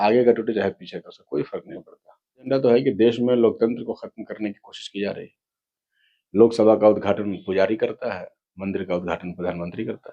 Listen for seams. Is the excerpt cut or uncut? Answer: cut